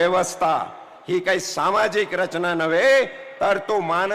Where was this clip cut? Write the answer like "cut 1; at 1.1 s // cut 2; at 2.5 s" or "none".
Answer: none